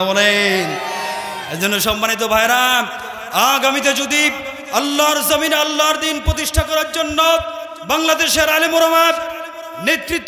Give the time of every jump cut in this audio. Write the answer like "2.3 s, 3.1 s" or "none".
7.7 s

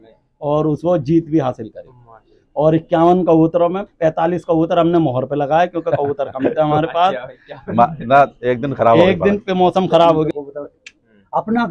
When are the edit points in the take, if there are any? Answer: 10.3 s

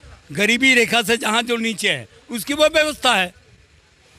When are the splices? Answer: none

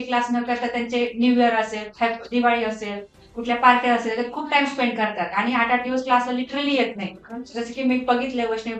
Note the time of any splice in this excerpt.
none

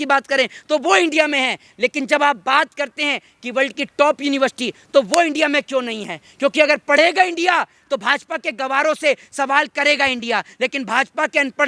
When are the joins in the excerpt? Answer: none

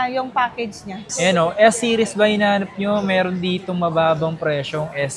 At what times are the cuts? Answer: 1.1 s

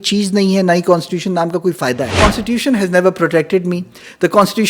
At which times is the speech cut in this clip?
2.2 s

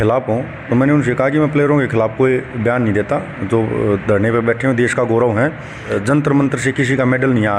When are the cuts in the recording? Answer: 5.9 s

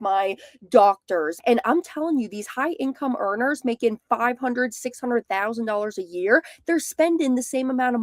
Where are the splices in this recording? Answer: 1.3 s

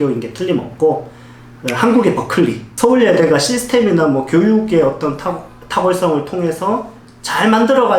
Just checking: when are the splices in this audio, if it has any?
2.7 s

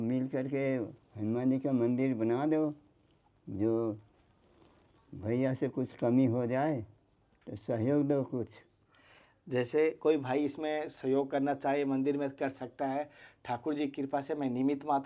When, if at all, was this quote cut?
none

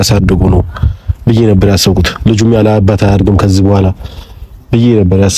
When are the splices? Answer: none

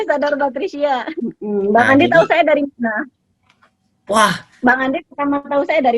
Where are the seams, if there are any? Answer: 1.1 s

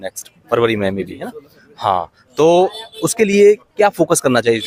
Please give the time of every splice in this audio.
none

